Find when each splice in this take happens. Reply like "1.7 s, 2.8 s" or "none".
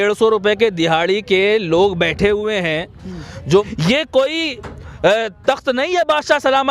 3.7 s